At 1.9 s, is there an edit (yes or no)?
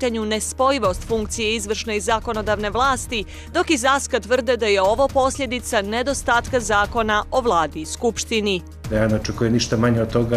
no